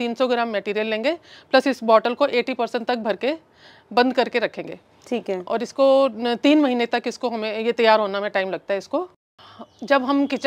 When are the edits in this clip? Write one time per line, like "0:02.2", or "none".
0:09.1